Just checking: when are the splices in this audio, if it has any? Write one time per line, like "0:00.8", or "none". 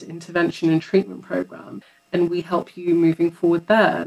0:02.0